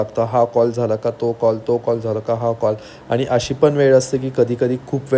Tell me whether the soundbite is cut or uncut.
uncut